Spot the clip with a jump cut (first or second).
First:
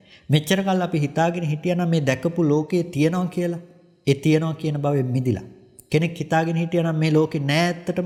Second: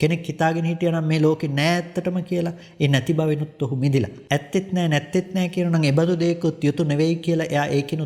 second